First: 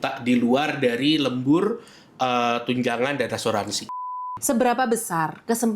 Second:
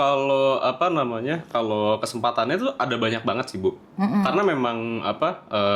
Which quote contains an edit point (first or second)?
first